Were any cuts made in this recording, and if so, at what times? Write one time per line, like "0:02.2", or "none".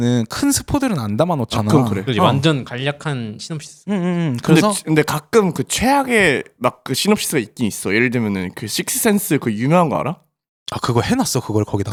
none